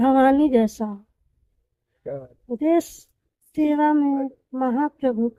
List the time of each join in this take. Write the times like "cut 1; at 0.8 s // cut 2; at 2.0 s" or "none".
none